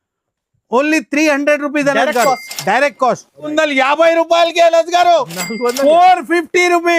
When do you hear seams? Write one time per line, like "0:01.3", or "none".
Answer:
0:03.5